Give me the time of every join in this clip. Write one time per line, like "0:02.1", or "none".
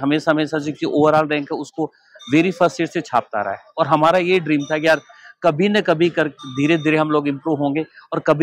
none